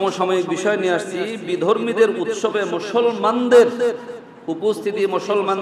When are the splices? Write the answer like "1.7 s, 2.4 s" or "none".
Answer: none